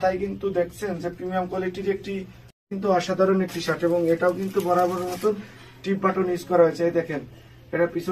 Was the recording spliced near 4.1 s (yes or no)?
no